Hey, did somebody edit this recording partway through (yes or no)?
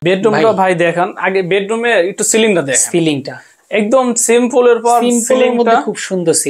no